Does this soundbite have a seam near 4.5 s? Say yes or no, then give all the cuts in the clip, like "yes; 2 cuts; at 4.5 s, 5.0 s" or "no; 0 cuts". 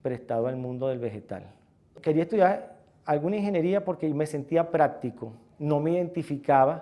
yes; 1 cut; at 4.5 s